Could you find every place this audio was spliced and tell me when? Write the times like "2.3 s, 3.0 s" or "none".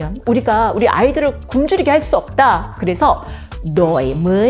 2.7 s